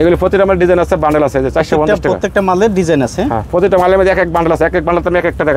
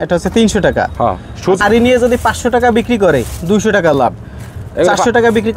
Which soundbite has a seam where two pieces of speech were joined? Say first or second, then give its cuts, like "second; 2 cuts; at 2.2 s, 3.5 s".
second; 1 cut; at 1.6 s